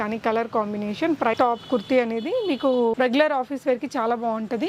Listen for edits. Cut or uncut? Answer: cut